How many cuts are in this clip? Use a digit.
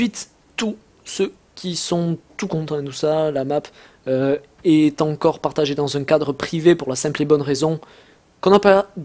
1